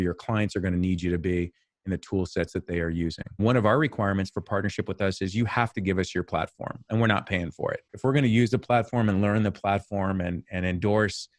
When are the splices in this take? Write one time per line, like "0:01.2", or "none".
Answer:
0:03.2